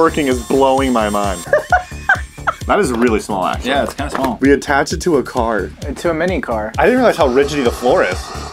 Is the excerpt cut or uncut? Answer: cut